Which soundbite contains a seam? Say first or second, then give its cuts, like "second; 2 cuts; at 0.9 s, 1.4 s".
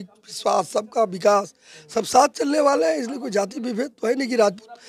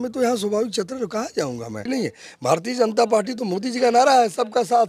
second; 1 cut; at 1.8 s